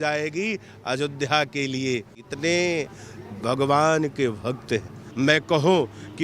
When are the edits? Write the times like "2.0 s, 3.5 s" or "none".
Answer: 2.2 s, 5.0 s

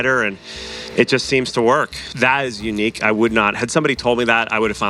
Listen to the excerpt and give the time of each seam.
2.0 s

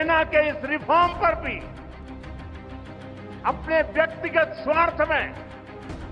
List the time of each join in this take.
1.6 s, 3.4 s

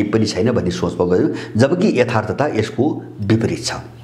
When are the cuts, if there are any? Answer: none

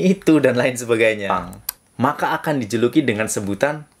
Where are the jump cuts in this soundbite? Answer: 1.3 s

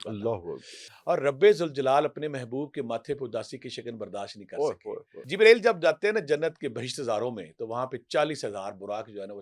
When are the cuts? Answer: 1.0 s, 5.2 s

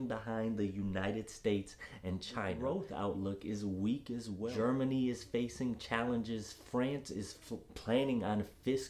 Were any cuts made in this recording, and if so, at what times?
2.6 s, 4.5 s

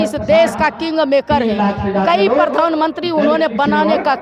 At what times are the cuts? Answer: none

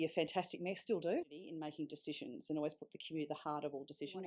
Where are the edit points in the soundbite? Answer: 1.2 s

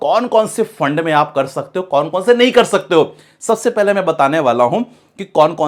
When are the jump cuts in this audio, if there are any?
none

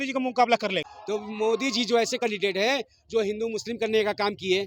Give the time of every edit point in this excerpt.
0.9 s

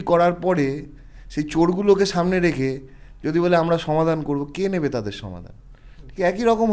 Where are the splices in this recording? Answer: none

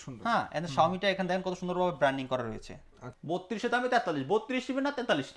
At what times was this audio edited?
3.1 s

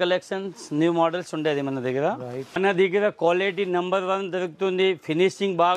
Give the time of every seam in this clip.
2.6 s

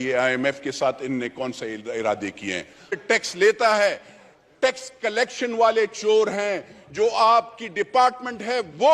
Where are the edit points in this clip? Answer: 3.0 s

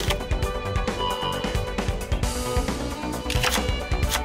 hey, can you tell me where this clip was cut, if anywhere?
none

